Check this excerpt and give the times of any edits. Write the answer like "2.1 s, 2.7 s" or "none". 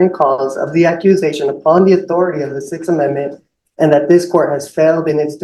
none